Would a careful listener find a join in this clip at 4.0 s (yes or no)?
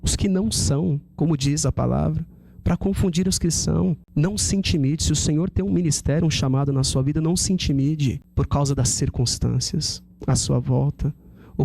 yes